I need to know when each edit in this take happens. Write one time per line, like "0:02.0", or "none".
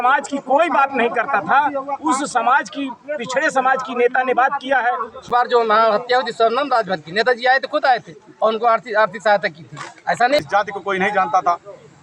0:05.2
0:10.4